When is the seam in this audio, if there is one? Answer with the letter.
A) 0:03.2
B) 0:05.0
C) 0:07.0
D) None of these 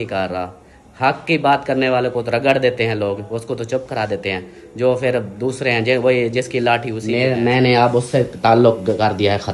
C